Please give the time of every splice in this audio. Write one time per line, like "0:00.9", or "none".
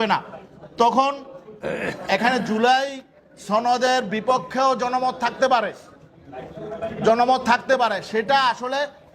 none